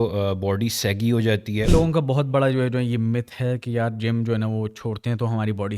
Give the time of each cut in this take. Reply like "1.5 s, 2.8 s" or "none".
1.7 s